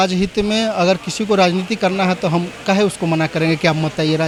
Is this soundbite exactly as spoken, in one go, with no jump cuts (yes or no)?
yes